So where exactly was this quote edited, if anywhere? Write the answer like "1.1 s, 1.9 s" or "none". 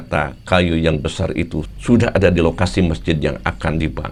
none